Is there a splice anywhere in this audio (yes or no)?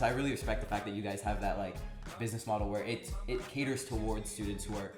no